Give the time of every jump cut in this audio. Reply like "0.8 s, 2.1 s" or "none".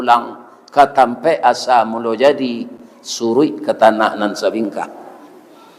none